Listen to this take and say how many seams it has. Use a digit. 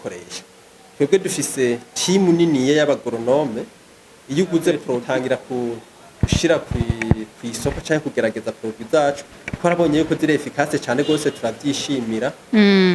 1